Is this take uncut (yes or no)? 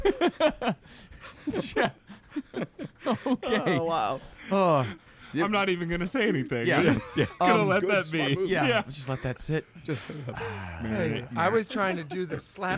yes